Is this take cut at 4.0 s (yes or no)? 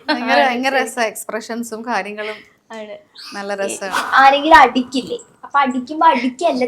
yes